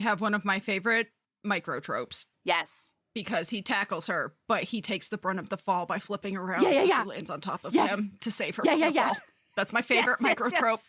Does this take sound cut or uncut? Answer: cut